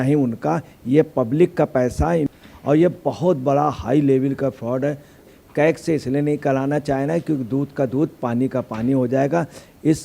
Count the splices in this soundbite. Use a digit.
2